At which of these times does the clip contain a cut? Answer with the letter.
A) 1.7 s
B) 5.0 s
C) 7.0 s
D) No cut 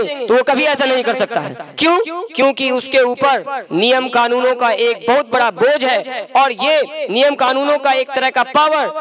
D